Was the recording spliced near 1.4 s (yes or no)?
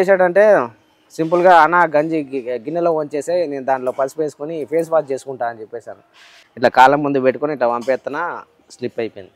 no